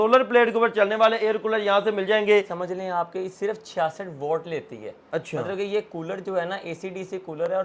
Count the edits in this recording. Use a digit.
1